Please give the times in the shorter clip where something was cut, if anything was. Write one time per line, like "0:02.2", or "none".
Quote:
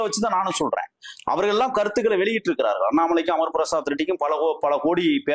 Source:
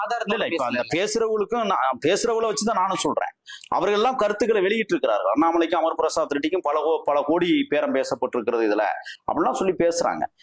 none